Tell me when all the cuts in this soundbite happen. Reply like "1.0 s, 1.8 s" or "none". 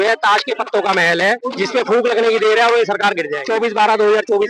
1.5 s, 3.3 s

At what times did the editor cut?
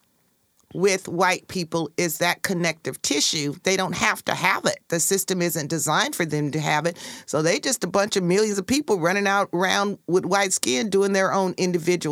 none

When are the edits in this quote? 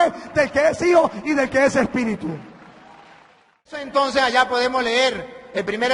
3.9 s

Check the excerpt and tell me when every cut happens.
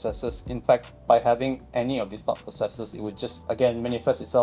0.9 s, 1.6 s, 3.4 s

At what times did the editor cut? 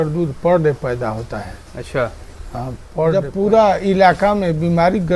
3.2 s

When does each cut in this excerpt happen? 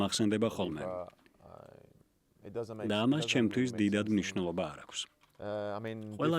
none

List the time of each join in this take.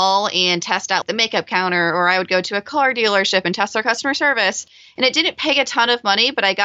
1.0 s

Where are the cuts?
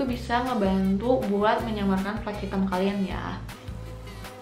none

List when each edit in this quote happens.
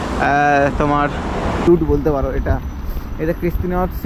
1.6 s

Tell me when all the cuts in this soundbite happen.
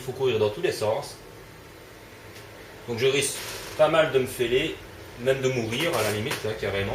5.8 s

